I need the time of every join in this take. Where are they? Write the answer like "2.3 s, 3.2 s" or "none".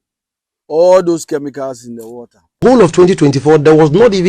2.6 s